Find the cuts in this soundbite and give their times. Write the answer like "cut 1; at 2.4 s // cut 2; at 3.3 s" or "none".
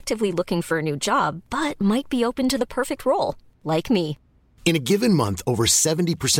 none